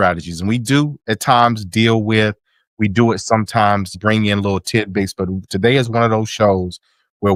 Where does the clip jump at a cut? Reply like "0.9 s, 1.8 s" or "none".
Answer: none